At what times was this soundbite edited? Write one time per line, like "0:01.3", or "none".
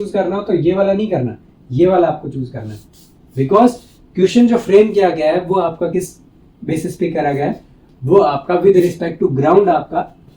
none